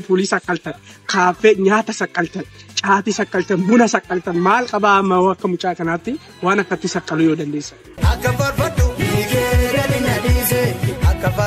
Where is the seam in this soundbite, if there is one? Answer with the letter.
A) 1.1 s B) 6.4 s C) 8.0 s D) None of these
C